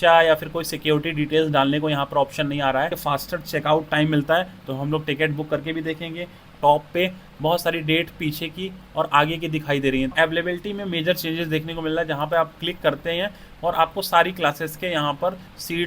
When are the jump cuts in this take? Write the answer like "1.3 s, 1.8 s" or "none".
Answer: 3.0 s, 6.5 s, 10.1 s